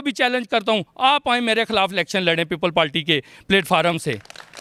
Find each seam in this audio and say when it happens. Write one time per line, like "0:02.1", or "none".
none